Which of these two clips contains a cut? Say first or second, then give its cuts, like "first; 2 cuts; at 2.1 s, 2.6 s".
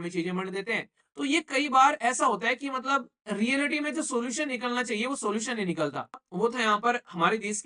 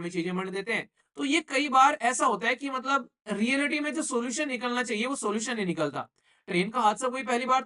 first; 1 cut; at 6.3 s